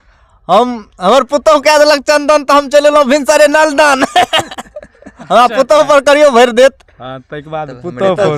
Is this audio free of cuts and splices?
yes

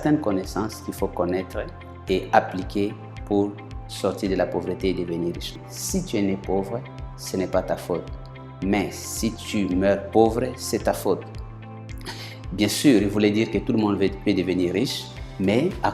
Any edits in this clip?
yes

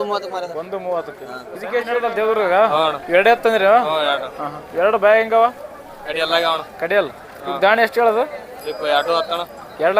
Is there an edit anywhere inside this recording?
yes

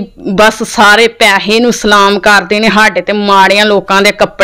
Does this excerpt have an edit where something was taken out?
no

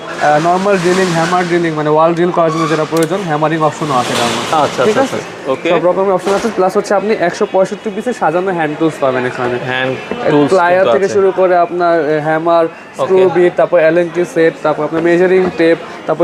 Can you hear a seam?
no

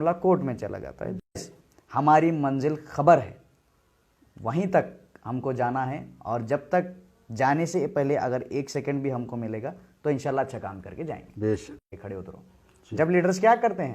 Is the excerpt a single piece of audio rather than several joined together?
no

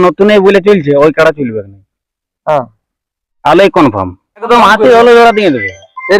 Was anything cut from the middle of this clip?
yes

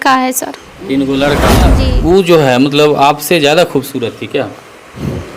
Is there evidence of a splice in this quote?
yes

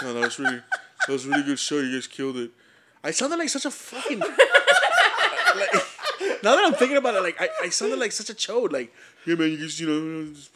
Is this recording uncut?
yes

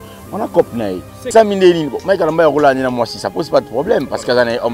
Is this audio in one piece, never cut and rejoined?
no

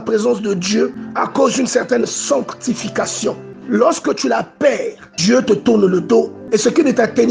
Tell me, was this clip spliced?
yes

